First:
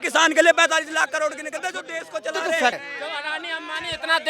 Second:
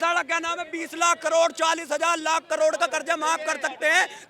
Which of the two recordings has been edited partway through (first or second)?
first